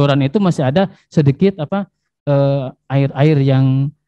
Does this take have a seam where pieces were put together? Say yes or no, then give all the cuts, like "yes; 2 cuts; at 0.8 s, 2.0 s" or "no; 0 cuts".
no; 0 cuts